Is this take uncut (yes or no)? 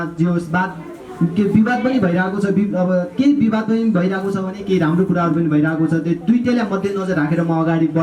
yes